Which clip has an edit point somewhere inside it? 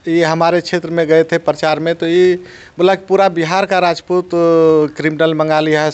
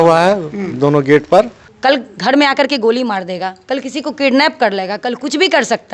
second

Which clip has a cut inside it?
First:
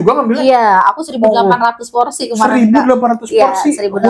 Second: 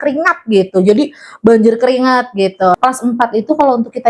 second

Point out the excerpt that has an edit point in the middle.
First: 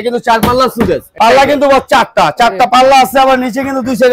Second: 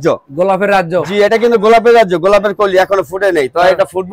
first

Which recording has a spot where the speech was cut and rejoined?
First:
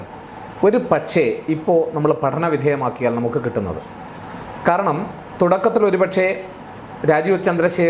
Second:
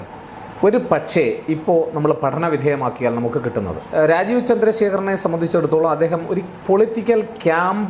second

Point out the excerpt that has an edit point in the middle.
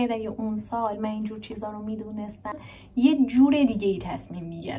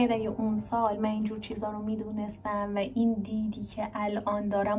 first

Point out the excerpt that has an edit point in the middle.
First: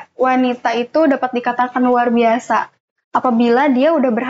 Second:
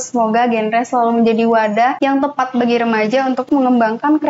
second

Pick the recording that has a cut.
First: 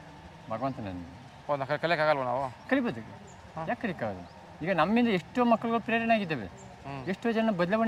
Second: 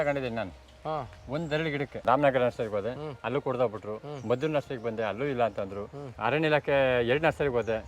second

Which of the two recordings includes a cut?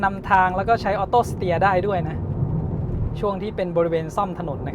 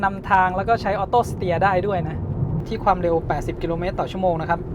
second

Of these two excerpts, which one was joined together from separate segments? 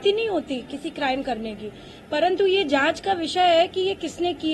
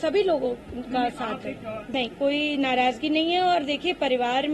second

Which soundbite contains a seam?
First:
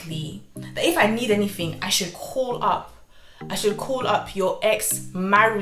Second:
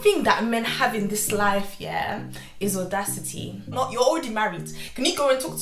second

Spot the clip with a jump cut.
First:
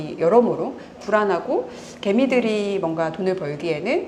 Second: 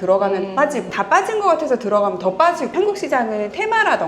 second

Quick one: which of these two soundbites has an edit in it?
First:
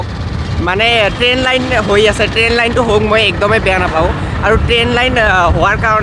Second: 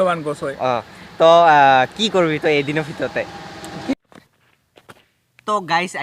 second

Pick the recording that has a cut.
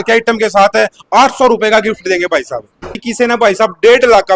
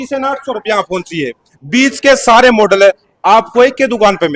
first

